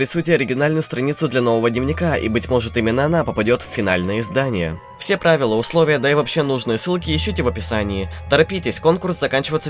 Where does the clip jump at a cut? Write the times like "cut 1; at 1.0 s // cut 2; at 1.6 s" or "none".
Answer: none